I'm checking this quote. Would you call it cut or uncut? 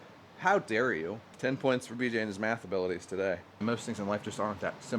cut